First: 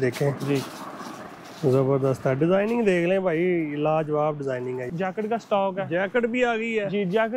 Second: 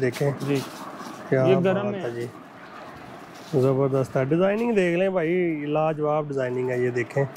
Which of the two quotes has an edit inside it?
first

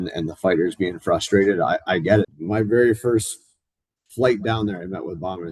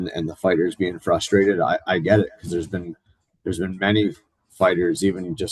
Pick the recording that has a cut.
first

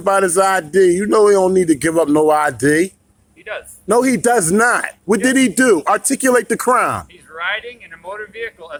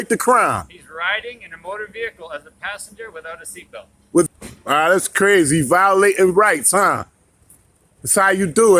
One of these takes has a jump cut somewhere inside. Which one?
second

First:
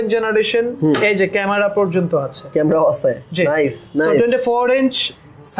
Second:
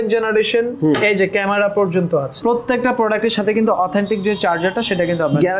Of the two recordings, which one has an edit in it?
second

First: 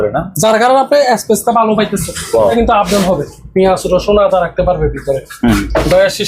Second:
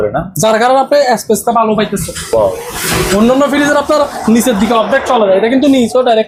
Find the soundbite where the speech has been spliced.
first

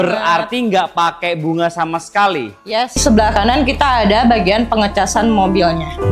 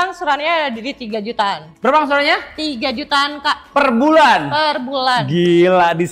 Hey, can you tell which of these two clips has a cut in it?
first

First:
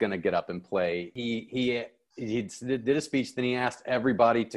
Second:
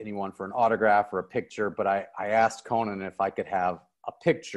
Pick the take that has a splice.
first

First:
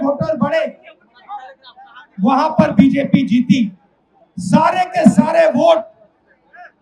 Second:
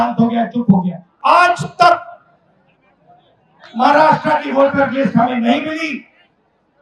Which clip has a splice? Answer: second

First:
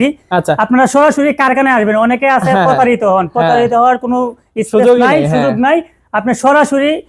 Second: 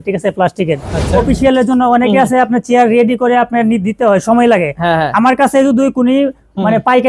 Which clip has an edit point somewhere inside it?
second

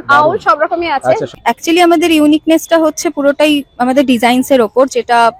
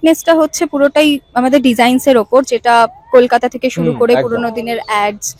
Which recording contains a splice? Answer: first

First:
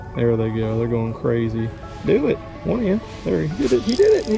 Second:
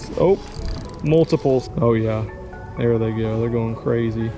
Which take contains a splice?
second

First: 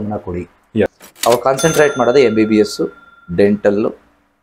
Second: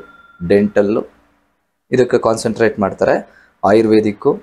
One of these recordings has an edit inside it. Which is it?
first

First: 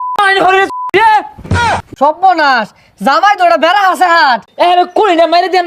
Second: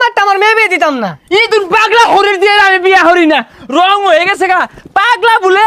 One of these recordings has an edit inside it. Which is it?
first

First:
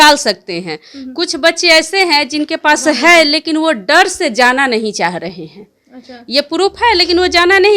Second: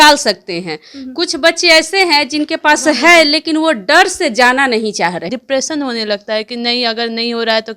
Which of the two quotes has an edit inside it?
second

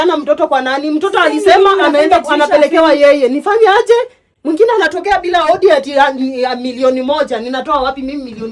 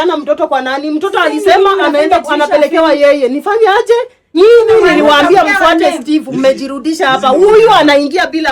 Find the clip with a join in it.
second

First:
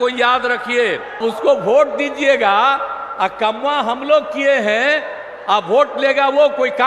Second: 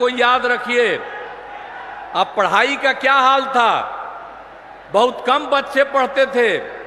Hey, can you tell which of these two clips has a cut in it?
first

